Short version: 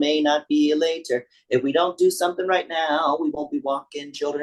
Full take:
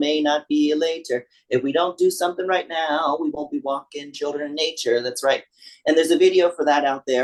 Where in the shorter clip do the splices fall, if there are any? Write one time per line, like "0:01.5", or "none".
none